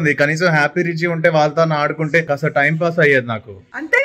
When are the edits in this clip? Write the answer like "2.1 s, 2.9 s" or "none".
2.2 s